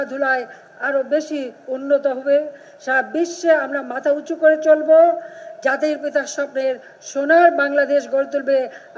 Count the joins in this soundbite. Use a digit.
0